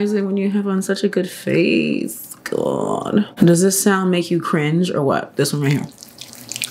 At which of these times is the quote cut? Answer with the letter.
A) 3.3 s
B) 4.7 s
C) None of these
A